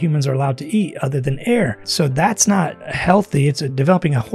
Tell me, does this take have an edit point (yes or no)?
yes